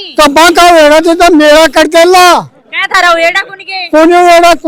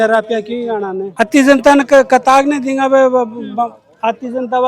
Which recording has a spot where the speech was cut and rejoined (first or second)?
second